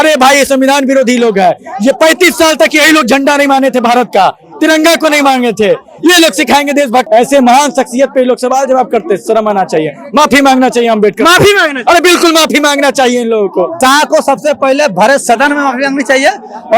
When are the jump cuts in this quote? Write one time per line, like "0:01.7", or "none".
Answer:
0:07.1
0:13.7